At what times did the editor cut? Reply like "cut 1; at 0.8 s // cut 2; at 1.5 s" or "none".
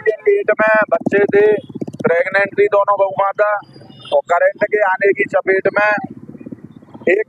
none